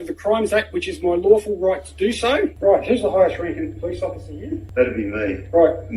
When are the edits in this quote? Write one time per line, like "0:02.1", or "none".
0:02.6
0:04.6